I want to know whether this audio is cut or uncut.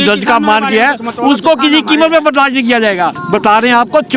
cut